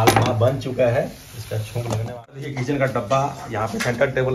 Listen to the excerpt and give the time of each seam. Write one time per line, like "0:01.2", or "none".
0:02.2